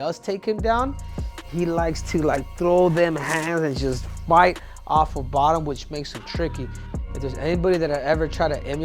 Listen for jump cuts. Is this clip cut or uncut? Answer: cut